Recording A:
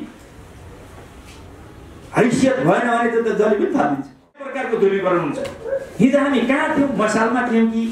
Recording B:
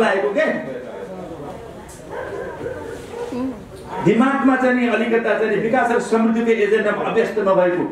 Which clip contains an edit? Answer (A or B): A